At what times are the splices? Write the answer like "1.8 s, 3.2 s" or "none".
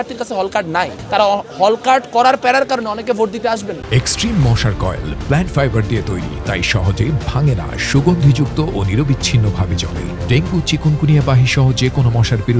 none